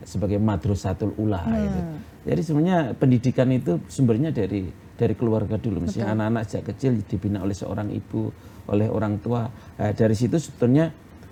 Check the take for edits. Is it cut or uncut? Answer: uncut